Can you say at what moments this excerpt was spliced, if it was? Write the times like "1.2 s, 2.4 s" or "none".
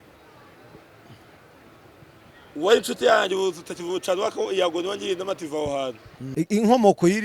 6.2 s